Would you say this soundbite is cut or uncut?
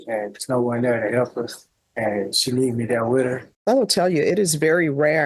cut